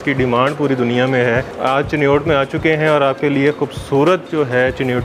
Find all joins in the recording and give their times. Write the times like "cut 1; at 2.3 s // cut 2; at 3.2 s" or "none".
cut 1; at 1.5 s